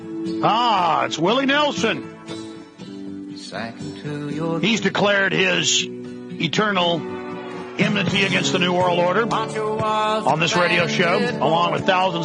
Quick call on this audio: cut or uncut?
uncut